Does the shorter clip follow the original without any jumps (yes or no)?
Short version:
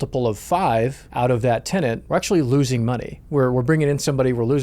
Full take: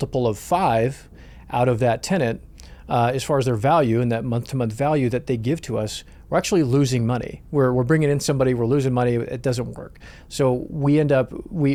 no